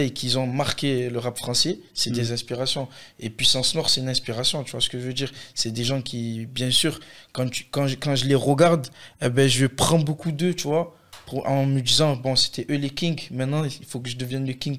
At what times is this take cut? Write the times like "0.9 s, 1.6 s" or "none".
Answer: none